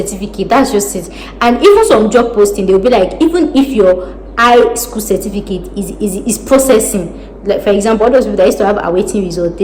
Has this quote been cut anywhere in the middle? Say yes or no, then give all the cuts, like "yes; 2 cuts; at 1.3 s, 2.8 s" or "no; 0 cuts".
no; 0 cuts